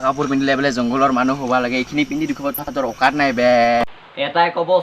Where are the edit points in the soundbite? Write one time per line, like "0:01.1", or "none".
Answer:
0:03.8